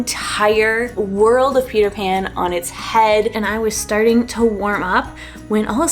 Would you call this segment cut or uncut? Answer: cut